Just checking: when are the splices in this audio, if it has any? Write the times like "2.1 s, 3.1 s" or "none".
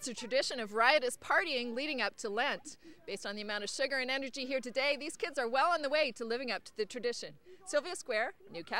none